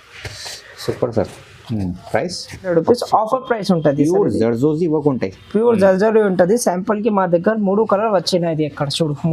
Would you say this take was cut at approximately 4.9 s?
no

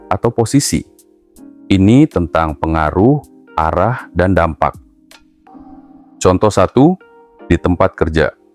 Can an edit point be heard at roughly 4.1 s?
no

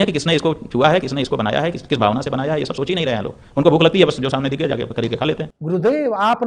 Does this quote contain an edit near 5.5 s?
yes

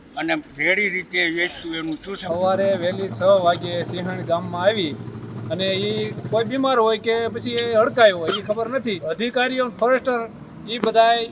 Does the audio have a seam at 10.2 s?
no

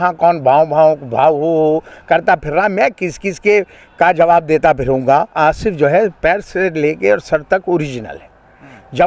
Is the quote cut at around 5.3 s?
yes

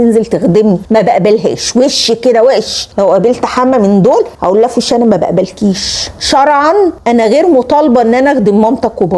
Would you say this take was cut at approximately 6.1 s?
yes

